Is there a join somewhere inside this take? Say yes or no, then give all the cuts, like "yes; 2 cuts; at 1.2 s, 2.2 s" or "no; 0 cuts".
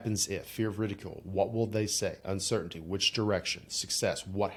no; 0 cuts